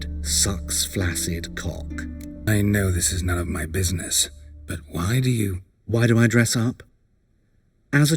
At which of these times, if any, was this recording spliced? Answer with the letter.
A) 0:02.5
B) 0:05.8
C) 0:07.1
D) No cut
A